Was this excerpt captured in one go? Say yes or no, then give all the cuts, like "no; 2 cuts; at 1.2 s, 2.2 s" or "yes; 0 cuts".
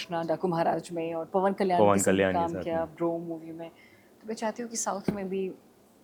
yes; 0 cuts